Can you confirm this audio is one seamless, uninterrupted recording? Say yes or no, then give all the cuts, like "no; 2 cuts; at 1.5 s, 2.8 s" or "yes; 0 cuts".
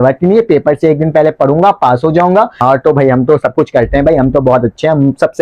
no; 1 cut; at 2.6 s